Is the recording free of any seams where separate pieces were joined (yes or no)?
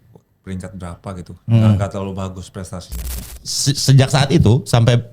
no